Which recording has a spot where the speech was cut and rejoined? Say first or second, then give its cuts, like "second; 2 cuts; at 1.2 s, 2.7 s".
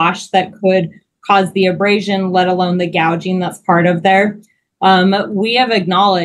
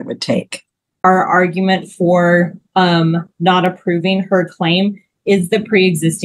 second; 1 cut; at 1.0 s